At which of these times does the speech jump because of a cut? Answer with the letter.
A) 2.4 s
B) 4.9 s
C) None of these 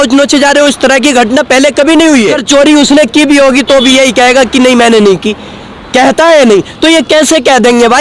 A